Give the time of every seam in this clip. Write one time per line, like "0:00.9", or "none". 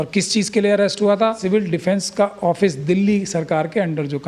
0:01.4